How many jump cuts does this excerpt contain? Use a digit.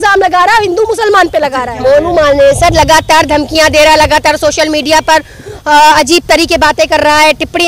1